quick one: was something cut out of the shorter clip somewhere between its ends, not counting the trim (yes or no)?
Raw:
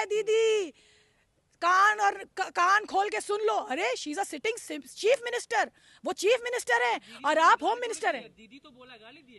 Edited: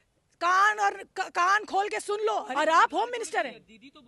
yes